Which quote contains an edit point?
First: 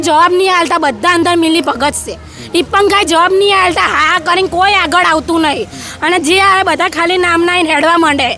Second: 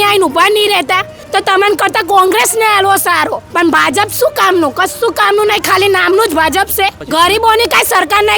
second; 3 cuts; at 1.2 s, 3.4 s, 7.0 s

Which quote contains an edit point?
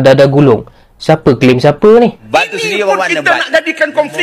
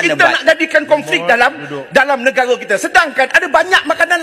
first; 1 cut; at 2.1 s

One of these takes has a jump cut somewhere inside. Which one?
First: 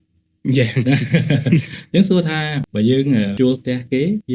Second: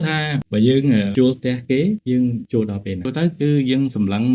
second; 1 cut; at 3.1 s

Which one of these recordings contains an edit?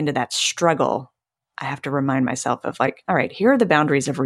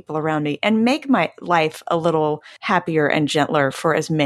second; 1 cut; at 2.5 s

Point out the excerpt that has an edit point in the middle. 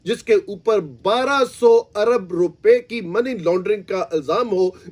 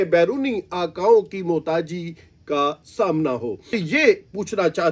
second; 1 cut; at 3.8 s

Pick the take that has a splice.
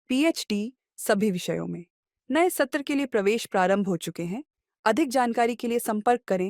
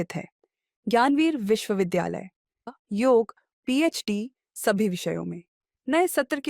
second; 1 cut; at 2.7 s

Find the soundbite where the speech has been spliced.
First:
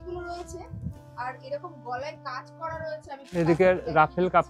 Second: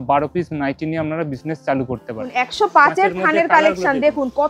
second; 1 cut; at 2.3 s

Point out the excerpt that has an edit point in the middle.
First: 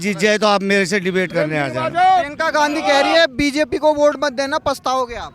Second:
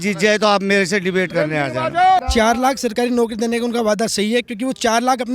second; 1 cut; at 2.2 s

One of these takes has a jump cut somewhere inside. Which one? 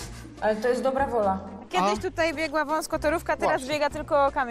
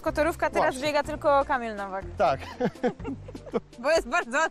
first; 1 cut; at 1.6 s

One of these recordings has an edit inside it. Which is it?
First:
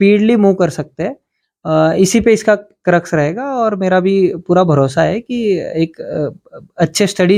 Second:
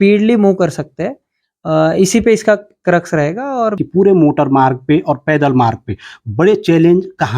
second; 1 cut; at 3.8 s

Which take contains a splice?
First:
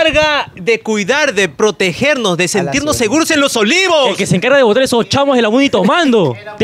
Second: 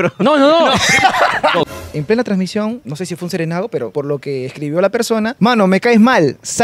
second; 4 cuts; at 1.6 s, 2.8 s, 3.9 s, 5.3 s

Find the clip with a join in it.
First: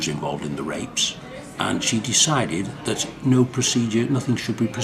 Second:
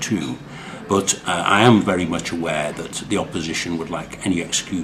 second; 1 cut; at 1.1 s

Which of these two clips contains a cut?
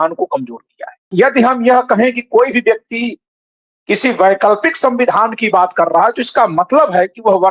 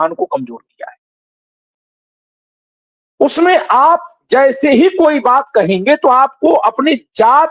first; 1 cut; at 1.1 s

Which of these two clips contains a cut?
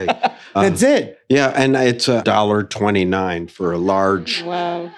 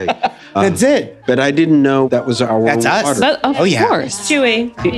second; 1 cut; at 1.1 s

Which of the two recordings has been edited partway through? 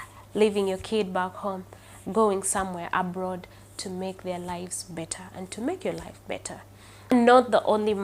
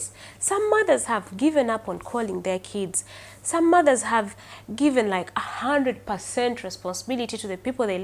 first; 1 cut; at 7.1 s

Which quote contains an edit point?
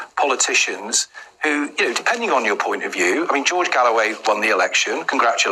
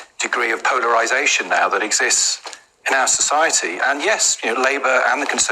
second; 1 cut; at 1.8 s

